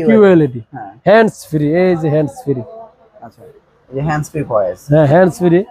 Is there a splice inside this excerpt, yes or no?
no